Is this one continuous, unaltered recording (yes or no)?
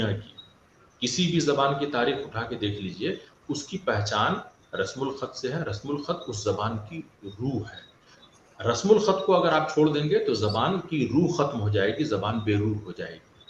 yes